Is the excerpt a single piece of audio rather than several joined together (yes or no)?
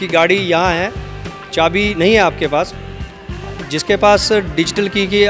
yes